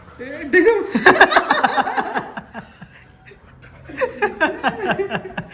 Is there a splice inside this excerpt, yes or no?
no